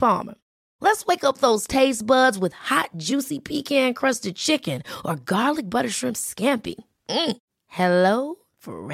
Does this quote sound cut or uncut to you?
uncut